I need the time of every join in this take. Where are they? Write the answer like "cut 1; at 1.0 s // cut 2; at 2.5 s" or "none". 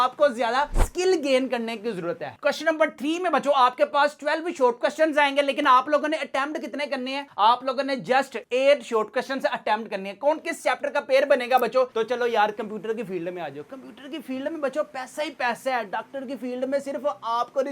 cut 1; at 2.3 s // cut 2; at 11.9 s